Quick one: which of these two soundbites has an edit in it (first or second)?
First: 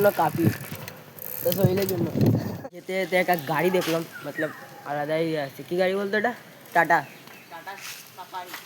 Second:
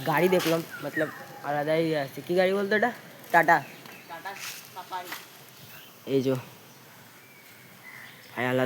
first